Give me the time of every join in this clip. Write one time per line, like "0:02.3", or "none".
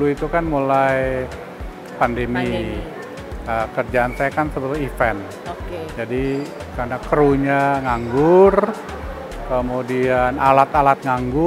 none